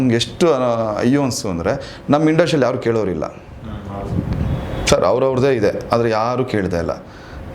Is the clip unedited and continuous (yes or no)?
yes